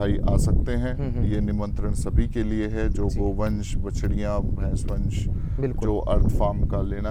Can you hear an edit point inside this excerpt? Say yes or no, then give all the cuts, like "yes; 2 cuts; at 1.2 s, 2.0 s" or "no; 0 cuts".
no; 0 cuts